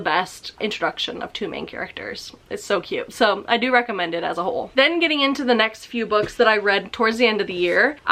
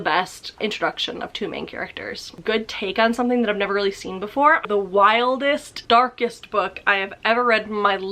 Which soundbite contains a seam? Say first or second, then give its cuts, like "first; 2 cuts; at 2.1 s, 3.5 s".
second; 2 cuts; at 2.4 s, 4.6 s